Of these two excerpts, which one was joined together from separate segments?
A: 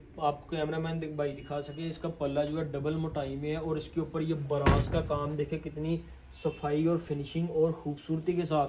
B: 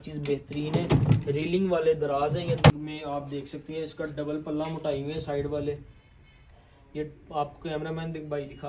B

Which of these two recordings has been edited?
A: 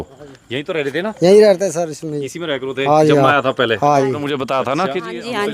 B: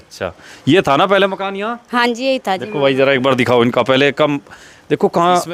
A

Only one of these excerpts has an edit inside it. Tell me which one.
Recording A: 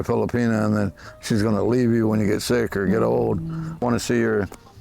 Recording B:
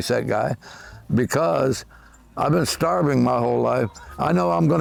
A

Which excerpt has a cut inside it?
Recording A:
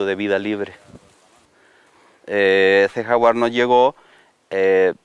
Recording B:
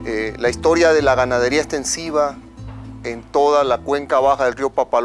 B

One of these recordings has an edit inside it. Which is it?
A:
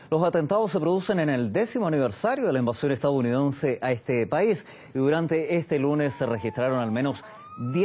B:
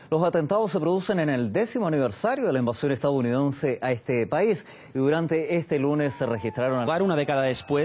A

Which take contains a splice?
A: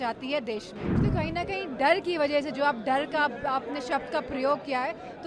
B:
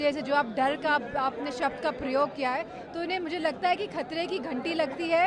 A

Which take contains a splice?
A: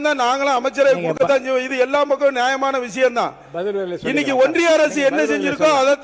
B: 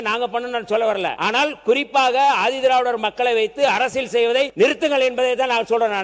B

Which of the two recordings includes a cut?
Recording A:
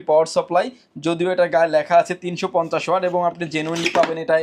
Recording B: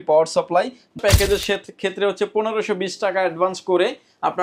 B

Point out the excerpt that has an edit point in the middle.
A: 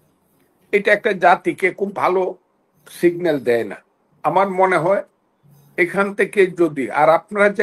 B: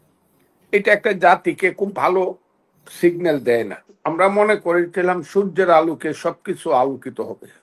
B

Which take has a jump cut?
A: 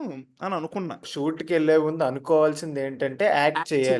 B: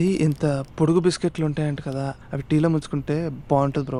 A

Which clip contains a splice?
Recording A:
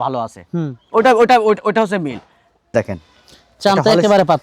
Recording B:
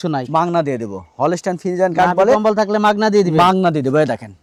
A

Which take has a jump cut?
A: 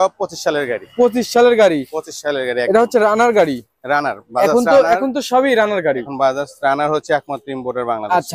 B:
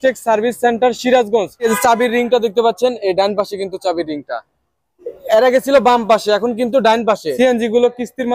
B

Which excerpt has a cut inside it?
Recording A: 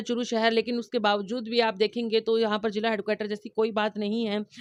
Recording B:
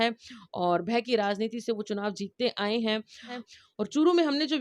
B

